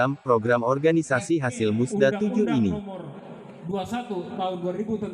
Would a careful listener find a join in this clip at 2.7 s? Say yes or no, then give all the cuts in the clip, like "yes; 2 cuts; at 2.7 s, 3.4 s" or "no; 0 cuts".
yes; 1 cut; at 2.7 s